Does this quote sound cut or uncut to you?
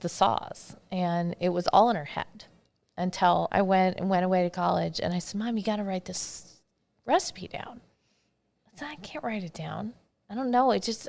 cut